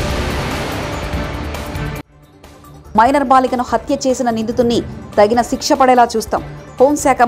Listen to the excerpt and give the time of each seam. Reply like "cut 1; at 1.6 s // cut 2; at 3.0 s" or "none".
cut 1; at 2.2 s